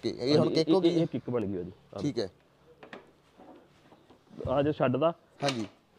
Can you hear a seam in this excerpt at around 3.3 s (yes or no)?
no